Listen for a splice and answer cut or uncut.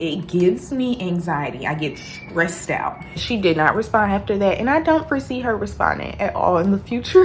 cut